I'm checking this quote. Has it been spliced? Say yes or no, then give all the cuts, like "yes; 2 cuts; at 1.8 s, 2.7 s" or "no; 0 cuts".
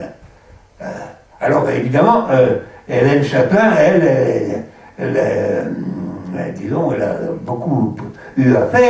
yes; 1 cut; at 4.4 s